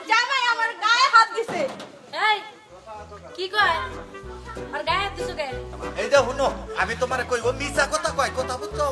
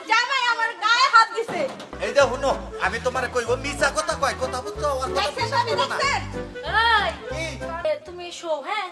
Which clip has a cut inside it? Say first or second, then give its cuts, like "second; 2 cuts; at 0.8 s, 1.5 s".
second; 2 cuts; at 1.9 s, 7.8 s